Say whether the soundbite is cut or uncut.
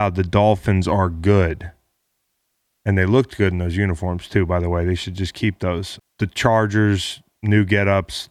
cut